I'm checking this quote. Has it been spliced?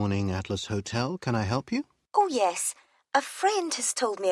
yes; 1 cut; at 2.0 s

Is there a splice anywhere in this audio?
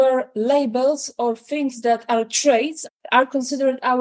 no; 0 cuts

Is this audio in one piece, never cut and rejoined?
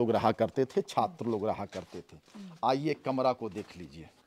yes; 0 cuts

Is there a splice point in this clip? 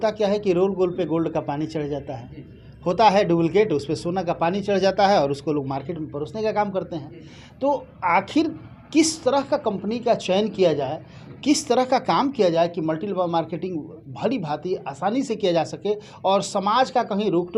no; 0 cuts

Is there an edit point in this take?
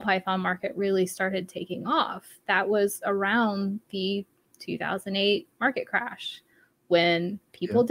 no; 0 cuts

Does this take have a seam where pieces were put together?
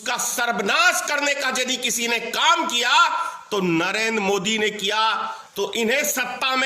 yes; 1 cut; at 5.4 s

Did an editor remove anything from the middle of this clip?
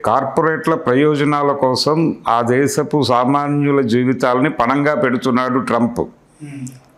no; 0 cuts

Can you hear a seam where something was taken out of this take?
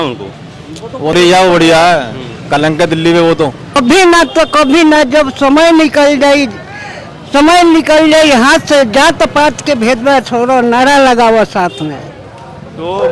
yes; 1 cut; at 3.8 s

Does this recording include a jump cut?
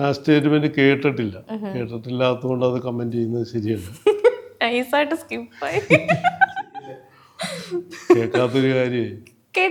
no; 0 cuts

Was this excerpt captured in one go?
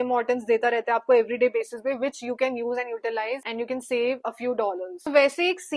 yes; 0 cuts

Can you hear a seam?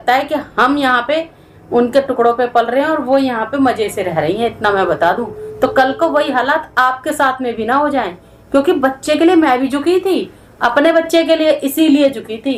no; 0 cuts

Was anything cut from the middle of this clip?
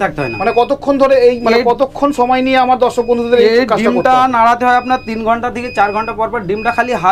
no; 0 cuts

